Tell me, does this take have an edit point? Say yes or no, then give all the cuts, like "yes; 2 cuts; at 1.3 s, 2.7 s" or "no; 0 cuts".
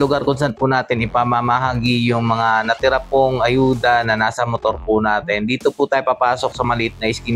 no; 0 cuts